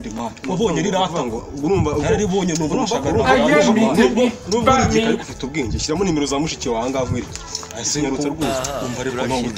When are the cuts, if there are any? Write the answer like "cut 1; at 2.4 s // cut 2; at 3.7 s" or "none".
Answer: none

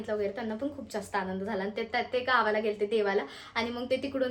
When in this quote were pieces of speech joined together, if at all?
none

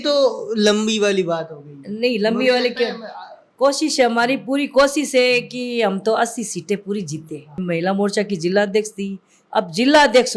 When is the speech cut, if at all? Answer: cut 1; at 7.6 s

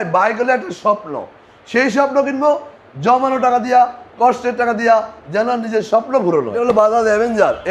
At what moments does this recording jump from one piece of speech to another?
cut 1; at 6.8 s

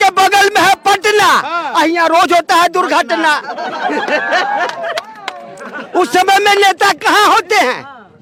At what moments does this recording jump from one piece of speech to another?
none

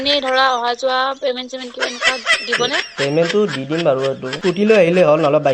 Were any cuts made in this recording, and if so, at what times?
cut 1; at 4.3 s

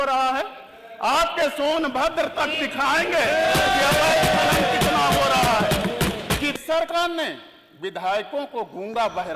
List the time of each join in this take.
cut 1; at 6.6 s

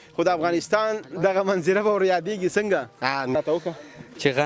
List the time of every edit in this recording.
cut 1; at 3.4 s

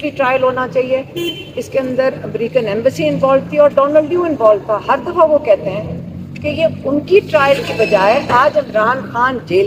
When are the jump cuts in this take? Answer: none

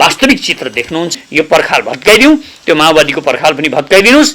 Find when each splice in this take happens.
cut 1; at 1.1 s

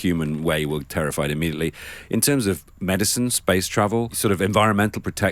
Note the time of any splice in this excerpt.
cut 1; at 4.1 s

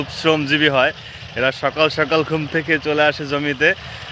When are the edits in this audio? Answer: none

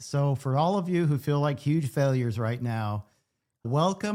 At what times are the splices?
none

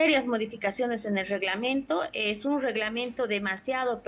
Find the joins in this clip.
none

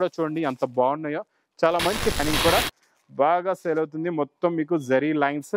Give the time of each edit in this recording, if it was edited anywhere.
cut 1; at 2.2 s

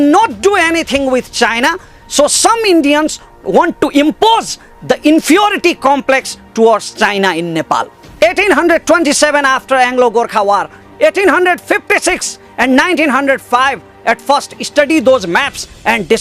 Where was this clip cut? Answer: cut 1; at 3.3 s // cut 2; at 7.9 s

